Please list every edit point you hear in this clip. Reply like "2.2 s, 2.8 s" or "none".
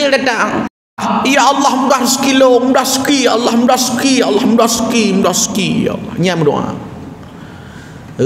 1.0 s